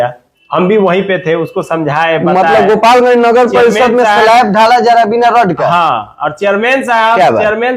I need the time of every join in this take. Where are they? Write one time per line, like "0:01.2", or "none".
none